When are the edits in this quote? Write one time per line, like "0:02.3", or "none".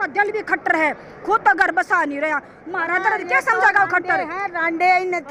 none